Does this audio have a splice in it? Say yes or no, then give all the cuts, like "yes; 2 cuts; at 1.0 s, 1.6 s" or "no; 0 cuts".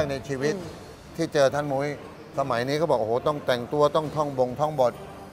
no; 0 cuts